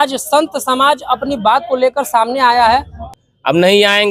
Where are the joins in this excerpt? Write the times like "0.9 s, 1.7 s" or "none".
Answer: 3.0 s